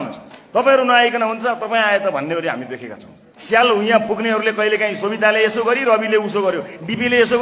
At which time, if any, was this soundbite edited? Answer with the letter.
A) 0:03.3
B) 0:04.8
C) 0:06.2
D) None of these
A